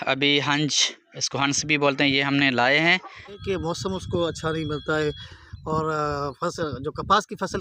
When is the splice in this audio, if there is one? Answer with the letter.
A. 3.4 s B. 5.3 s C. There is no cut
A